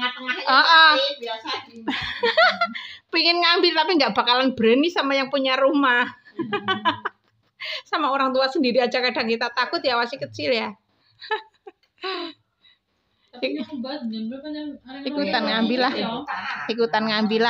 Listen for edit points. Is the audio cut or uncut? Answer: uncut